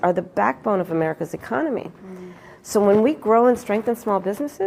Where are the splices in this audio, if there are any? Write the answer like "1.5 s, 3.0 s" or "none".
none